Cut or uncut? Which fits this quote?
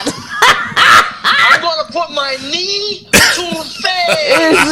uncut